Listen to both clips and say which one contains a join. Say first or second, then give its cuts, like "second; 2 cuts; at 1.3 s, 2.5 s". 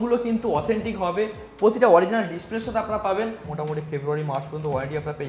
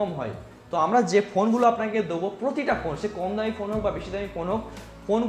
first; 1 cut; at 3.5 s